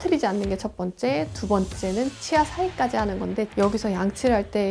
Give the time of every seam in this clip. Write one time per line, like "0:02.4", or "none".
0:03.5